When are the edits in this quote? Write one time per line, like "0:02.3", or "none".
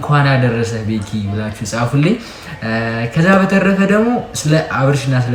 none